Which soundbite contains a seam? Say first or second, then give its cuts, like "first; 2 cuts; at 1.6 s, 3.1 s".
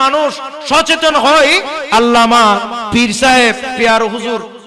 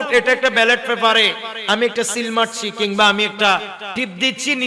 first; 2 cuts; at 1.8 s, 3.7 s